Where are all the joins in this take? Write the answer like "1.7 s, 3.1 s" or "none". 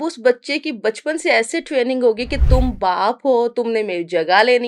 none